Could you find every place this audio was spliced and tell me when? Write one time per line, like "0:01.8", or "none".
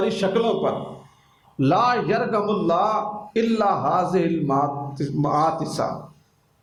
none